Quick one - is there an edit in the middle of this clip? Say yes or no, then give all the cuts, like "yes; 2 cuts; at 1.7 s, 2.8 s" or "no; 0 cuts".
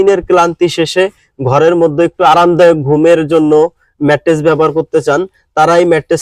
no; 0 cuts